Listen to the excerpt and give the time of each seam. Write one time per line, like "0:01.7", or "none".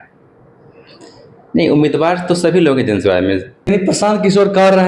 0:03.7